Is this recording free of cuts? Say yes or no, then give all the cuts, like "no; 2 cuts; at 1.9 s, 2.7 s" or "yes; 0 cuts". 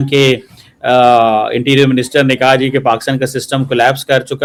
yes; 0 cuts